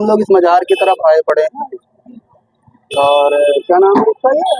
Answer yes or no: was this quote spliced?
no